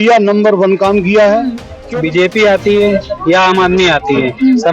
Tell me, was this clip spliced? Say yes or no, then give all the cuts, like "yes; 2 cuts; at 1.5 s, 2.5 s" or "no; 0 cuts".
yes; 1 cut; at 1.8 s